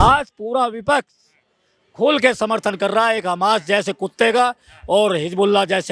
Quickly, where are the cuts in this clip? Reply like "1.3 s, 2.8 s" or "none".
none